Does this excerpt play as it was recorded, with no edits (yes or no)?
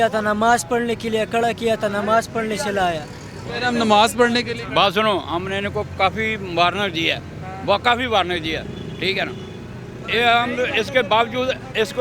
yes